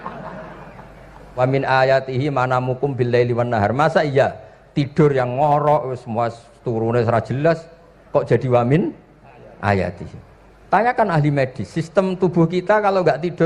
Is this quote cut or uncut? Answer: cut